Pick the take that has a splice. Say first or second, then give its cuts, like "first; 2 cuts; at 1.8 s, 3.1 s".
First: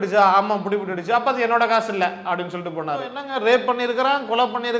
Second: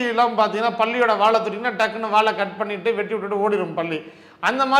first; 1 cut; at 3.2 s